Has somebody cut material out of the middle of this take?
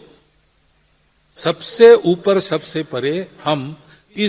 no; 0 cuts

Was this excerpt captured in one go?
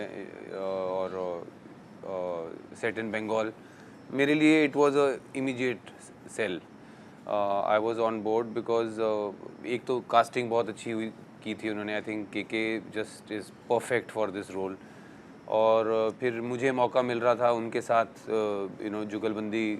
yes; 0 cuts

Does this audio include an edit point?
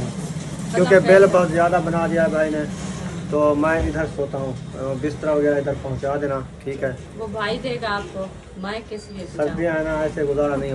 yes; 1 cut; at 3.4 s

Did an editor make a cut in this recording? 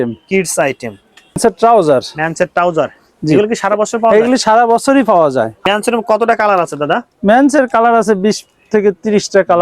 yes; 2 cuts; at 1.4 s, 5.7 s

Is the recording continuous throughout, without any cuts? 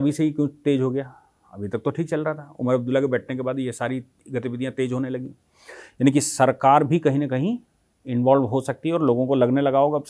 yes; 0 cuts

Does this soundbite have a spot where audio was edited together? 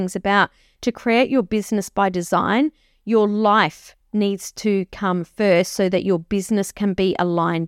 no; 0 cuts

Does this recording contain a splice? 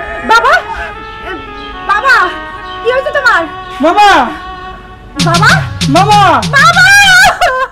no; 0 cuts

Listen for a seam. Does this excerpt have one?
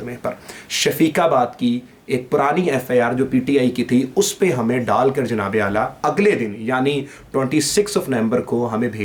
no; 0 cuts

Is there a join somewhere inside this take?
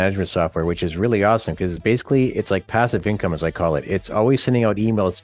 no; 0 cuts

